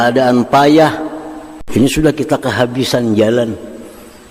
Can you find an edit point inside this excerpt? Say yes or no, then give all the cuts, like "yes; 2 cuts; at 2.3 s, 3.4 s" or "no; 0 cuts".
yes; 1 cut; at 1.6 s